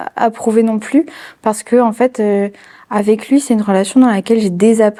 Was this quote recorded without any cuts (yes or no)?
yes